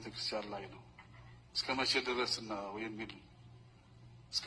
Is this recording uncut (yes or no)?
yes